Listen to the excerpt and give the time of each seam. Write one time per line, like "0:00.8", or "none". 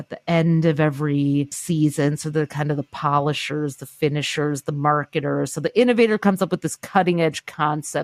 none